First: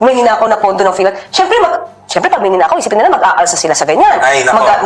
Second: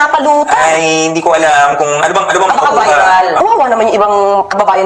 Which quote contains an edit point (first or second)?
second